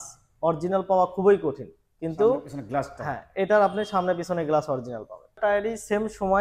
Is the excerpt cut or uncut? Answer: cut